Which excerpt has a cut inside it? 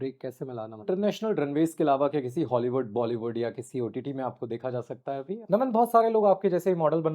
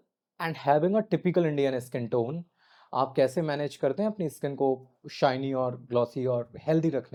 first; 2 cuts; at 0.8 s, 5.4 s

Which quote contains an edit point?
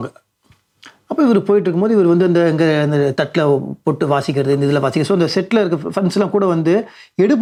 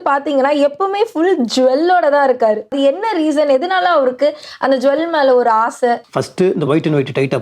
second; 2 cuts; at 2.7 s, 6.2 s

